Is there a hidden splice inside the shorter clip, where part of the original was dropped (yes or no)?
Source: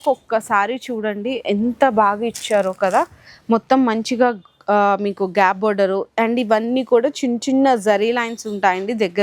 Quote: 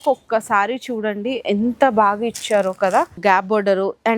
yes